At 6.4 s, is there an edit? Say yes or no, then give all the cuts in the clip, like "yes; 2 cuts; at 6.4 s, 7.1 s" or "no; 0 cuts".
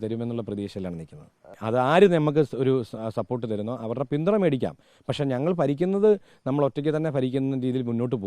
no; 1 cut; at 1.6 s